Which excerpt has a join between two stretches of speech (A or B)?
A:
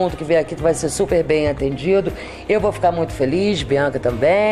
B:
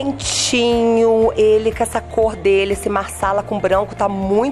B